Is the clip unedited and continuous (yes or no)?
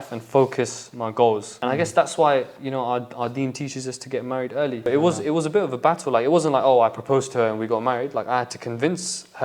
no